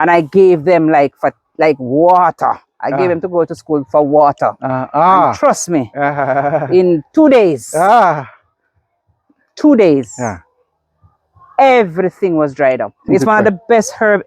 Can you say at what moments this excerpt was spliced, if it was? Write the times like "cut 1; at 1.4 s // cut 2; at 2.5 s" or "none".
cut 1; at 13.1 s